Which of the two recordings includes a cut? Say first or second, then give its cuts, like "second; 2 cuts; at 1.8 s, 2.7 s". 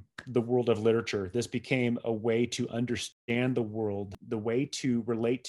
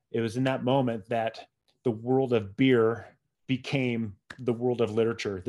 first; 2 cuts; at 3.0 s, 4.2 s